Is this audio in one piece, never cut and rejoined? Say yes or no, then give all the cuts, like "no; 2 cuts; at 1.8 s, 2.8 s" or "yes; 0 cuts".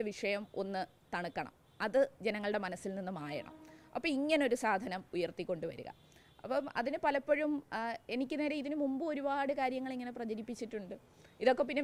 yes; 0 cuts